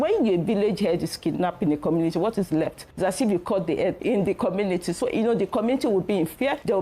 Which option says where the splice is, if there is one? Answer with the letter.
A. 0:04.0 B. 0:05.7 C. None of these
A